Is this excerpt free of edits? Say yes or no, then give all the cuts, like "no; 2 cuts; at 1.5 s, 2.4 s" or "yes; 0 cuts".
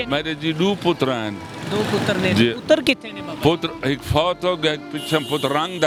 yes; 0 cuts